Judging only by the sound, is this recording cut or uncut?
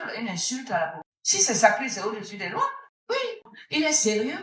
cut